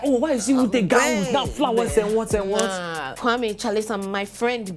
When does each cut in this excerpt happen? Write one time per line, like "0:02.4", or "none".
0:03.0